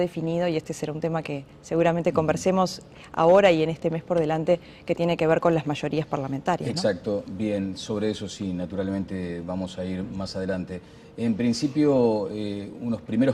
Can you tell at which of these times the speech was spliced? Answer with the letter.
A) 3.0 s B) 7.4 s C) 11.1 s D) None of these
C